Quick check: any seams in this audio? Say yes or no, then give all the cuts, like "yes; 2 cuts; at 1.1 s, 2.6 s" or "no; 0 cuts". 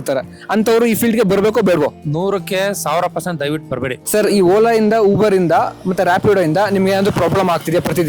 yes; 2 cuts; at 2.0 s, 4.0 s